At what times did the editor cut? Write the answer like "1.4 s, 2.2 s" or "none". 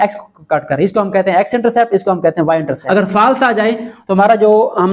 2.8 s